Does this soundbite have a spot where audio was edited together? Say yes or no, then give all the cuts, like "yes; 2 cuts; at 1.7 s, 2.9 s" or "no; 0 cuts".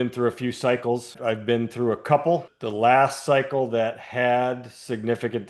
yes; 2 cuts; at 1.1 s, 2.6 s